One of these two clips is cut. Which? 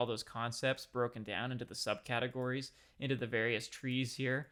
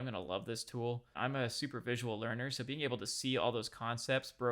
second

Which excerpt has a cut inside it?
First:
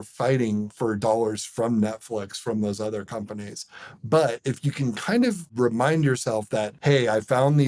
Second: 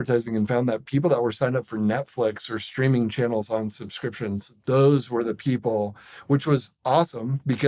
first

